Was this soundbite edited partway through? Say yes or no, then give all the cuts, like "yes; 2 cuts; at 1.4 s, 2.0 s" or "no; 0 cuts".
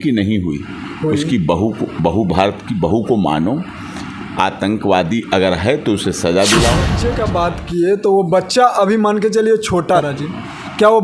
yes; 2 cuts; at 7.0 s, 10.0 s